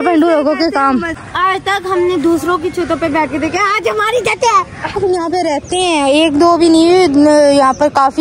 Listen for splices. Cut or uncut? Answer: cut